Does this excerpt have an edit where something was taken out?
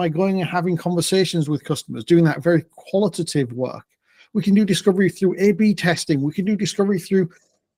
no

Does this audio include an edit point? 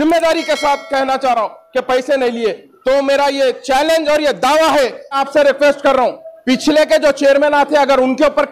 yes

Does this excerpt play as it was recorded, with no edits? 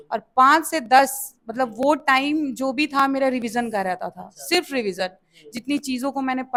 yes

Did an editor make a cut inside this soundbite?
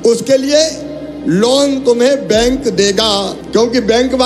yes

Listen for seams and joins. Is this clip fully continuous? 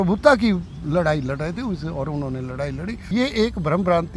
no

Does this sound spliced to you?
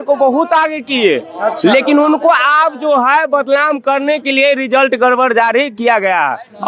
no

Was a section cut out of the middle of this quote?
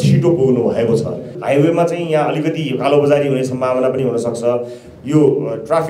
yes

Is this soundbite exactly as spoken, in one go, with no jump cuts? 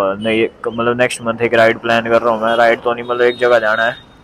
yes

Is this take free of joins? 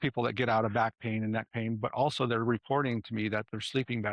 yes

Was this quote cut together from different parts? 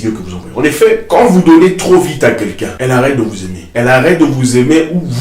yes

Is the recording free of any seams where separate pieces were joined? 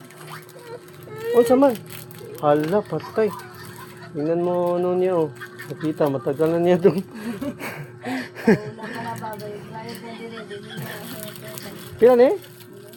yes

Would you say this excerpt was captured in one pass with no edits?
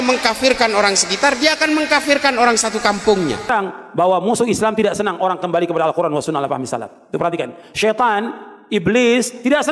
no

